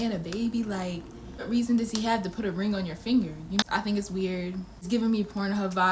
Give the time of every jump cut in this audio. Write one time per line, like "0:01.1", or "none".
0:01.5
0:03.7
0:04.9